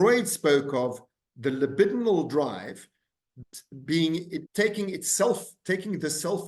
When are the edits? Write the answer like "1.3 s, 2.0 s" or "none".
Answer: 4.4 s